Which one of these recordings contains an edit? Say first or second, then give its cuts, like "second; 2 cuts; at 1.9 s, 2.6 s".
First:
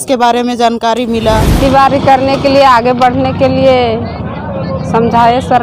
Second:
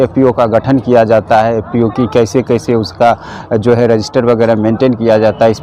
first; 1 cut; at 1.5 s